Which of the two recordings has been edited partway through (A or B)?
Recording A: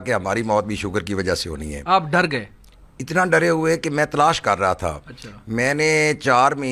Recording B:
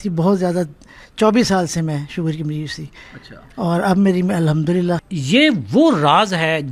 B